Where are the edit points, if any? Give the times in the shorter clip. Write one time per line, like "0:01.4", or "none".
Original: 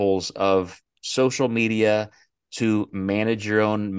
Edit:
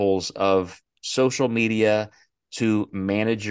none

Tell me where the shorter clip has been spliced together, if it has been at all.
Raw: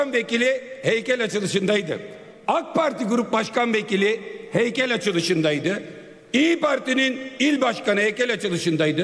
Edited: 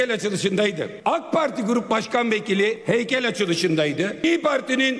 0:00.9
0:02.8
0:04.2

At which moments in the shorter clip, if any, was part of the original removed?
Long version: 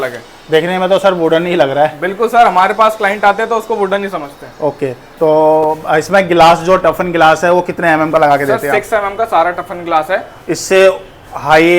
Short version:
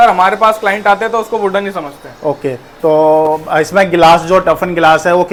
none

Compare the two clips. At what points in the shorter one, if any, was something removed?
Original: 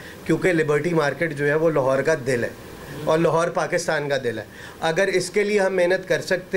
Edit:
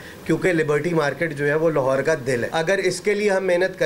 0:02.5

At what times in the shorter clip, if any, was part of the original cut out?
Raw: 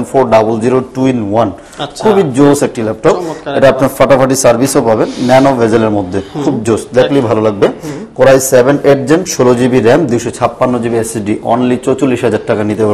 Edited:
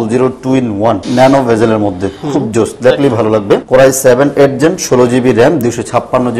0:01.1
0:03.6

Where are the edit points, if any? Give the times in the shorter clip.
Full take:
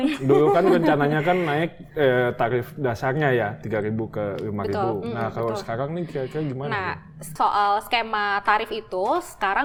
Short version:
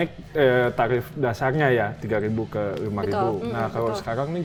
none

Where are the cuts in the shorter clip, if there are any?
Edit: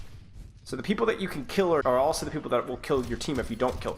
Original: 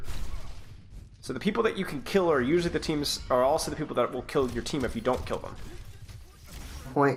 0:01.8

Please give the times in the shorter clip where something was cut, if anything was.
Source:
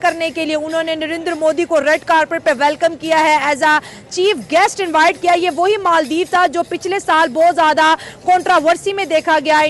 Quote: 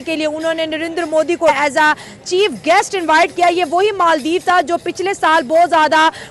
0:01.5

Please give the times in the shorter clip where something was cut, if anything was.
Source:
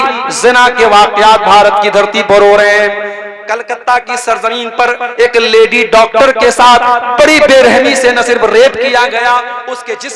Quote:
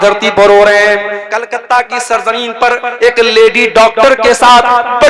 0:01.2

